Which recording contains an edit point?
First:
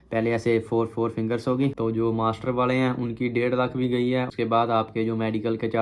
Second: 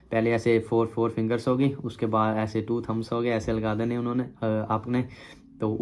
first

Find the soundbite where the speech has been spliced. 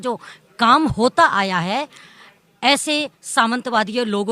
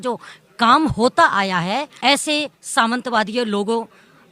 second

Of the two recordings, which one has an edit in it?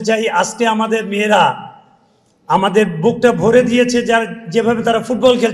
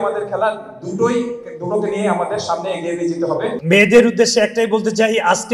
second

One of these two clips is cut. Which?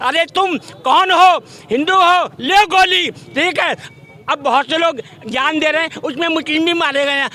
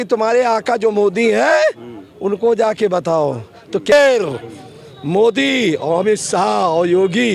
second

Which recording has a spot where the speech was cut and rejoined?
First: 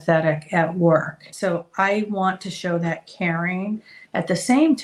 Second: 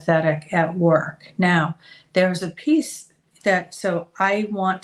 first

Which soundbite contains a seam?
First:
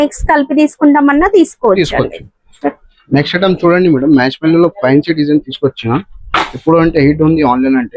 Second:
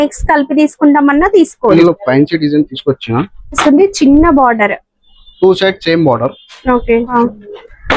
second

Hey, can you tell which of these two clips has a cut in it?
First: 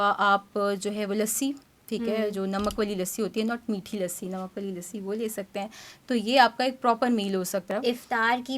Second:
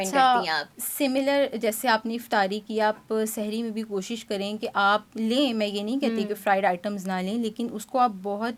first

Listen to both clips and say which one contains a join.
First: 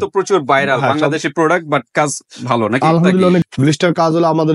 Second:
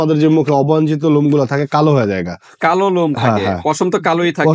first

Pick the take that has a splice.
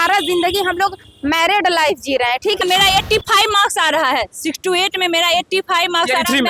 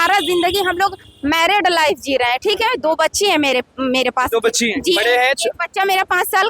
first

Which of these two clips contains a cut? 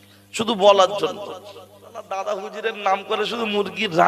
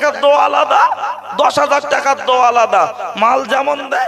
first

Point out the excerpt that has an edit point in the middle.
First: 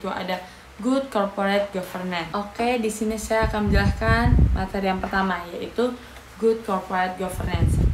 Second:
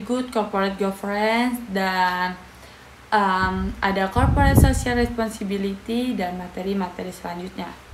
first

